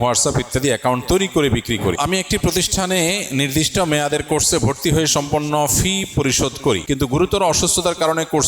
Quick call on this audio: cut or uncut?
cut